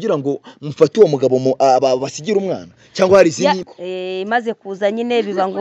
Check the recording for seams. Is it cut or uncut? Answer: cut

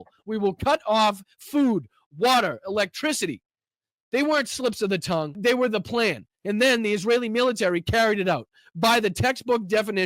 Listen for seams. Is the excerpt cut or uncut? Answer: cut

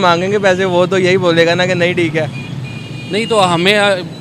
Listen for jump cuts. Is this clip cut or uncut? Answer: uncut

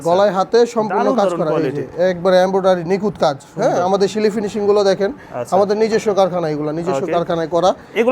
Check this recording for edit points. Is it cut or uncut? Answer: uncut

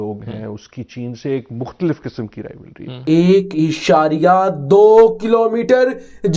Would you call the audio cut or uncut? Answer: cut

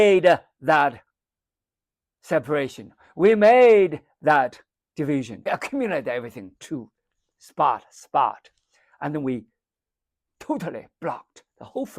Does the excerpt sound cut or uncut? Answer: cut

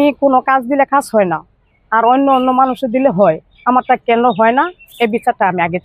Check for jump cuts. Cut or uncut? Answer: uncut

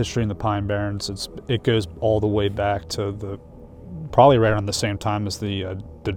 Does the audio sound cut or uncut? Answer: uncut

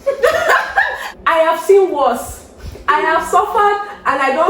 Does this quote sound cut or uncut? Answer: cut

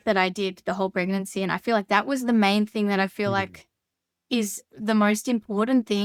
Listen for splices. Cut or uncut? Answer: uncut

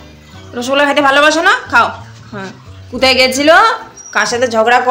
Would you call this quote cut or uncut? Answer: uncut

